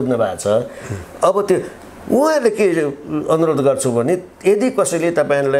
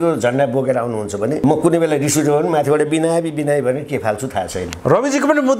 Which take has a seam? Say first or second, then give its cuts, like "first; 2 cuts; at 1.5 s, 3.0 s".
second; 1 cut; at 1.4 s